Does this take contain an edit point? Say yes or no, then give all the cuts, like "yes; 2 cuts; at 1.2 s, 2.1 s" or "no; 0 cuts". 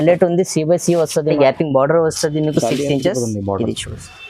yes; 1 cut; at 1.4 s